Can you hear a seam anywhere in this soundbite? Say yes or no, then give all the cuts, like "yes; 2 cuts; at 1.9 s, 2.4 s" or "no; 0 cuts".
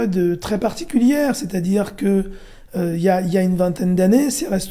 no; 0 cuts